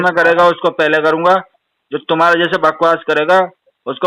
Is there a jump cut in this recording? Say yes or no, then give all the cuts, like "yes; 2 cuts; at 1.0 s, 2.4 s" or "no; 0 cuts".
no; 0 cuts